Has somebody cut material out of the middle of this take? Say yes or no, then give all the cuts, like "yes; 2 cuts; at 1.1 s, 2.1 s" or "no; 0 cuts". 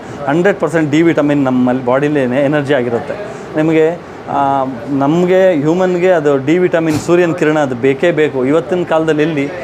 no; 0 cuts